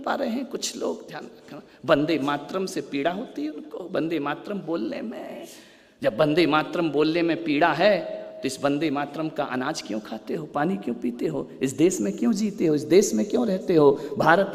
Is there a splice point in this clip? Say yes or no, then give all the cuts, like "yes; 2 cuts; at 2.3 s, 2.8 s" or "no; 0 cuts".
no; 0 cuts